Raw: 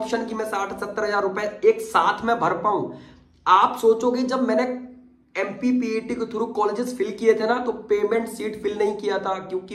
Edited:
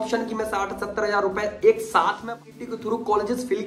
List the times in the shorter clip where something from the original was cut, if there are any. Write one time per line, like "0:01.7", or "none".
0:02.4

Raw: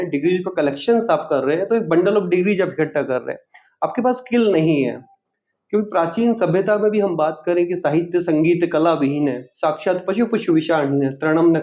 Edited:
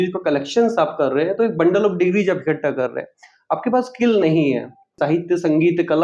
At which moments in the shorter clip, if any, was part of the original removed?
0:04.9

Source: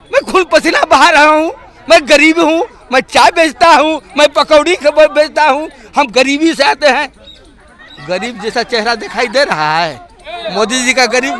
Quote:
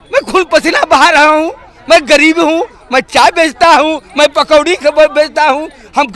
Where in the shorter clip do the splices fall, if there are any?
none

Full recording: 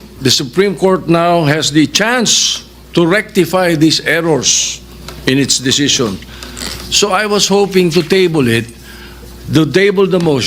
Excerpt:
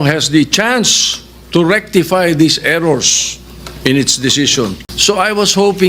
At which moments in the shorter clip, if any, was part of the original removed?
0:04.9

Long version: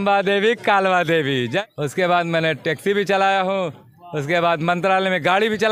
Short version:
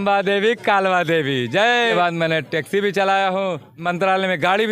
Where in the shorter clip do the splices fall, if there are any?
0:01.8
0:03.8

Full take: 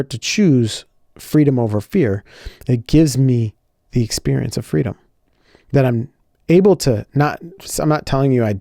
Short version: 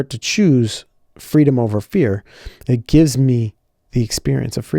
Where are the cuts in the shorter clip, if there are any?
none

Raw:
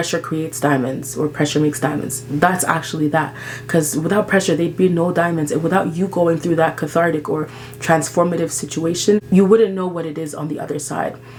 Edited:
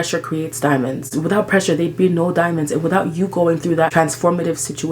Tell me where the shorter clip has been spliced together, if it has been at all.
0:01.1
0:03.9

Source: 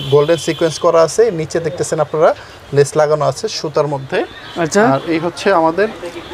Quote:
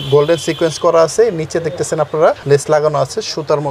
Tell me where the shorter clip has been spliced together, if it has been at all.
0:02.4

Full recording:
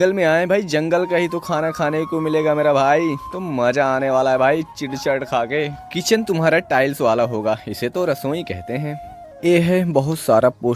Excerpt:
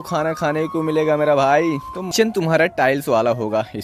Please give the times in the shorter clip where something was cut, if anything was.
0:02.0

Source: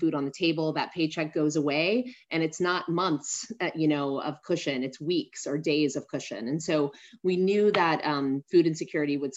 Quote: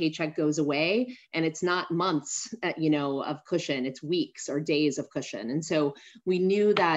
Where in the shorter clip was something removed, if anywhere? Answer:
none

